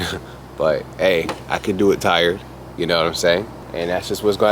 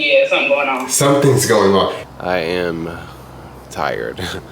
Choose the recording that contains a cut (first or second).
second